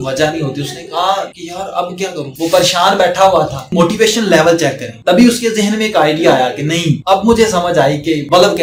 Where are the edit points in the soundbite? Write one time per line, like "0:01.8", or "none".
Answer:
none